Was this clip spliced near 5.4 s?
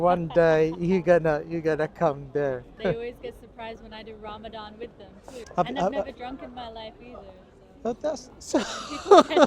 yes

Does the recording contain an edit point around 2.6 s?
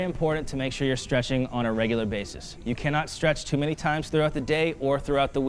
no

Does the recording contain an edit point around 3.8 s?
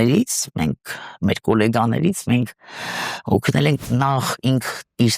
yes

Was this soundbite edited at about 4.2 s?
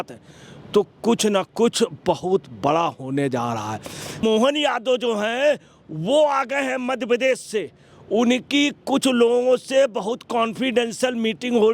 yes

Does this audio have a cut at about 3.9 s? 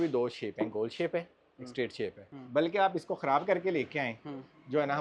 no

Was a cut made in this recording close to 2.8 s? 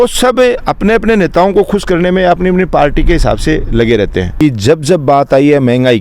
no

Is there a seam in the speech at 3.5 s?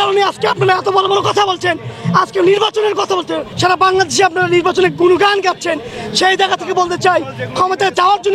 yes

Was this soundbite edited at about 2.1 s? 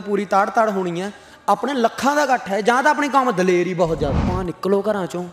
no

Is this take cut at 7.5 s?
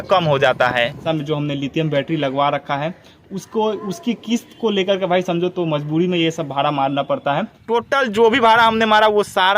yes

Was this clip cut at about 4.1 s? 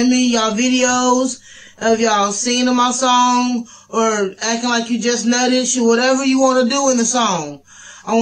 no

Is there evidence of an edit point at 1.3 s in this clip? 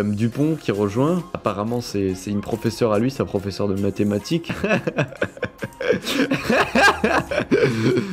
no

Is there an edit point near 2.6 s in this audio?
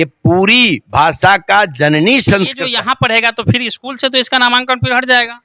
yes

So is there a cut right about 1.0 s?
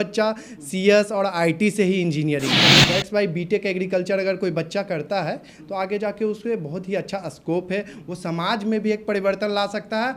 no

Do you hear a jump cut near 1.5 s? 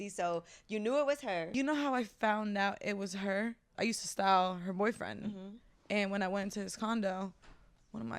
yes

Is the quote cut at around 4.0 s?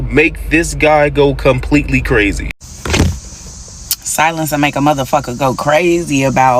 no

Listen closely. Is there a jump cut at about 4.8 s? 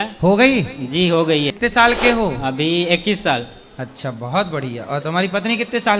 no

